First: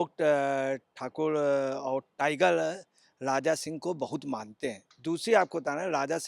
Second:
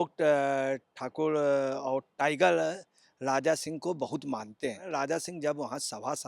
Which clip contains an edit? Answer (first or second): second